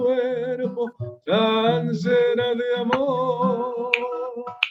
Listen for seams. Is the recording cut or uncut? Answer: uncut